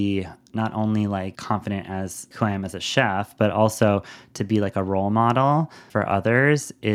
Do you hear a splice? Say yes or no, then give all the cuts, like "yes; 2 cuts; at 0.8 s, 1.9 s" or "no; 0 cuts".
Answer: yes; 3 cuts; at 1.4 s, 2.3 s, 5.8 s